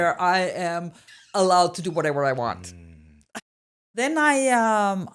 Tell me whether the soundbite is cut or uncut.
cut